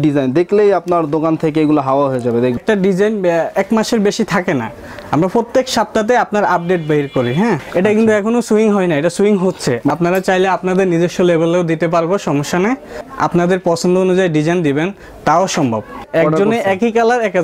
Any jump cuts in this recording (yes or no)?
yes